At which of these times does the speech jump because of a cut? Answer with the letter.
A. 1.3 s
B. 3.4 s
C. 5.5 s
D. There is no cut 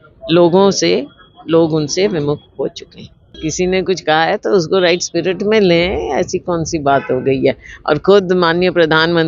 B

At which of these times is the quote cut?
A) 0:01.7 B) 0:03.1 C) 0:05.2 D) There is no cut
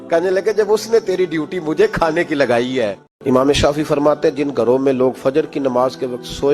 B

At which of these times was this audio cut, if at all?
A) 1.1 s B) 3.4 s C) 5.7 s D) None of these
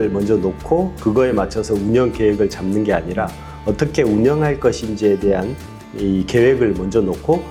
D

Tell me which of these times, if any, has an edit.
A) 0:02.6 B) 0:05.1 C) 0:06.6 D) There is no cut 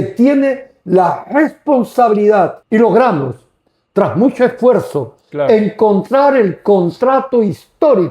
A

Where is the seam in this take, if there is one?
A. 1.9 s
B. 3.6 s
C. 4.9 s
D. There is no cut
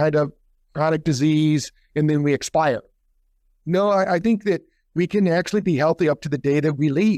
D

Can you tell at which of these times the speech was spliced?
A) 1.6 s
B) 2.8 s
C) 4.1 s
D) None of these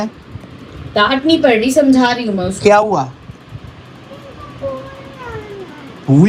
D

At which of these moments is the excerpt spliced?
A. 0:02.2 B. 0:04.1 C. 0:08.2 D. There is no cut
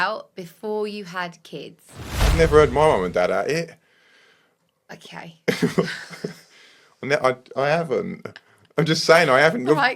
A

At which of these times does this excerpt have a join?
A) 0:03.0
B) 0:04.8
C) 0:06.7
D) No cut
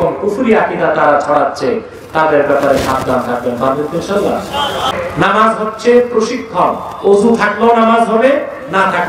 B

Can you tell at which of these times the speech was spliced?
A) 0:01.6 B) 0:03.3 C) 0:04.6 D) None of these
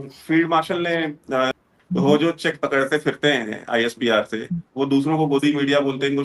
A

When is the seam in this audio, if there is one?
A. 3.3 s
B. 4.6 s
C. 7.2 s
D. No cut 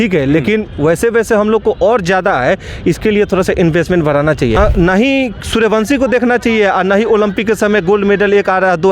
B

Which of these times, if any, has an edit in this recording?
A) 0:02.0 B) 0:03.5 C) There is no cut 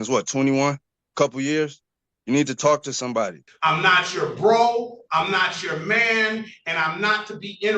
B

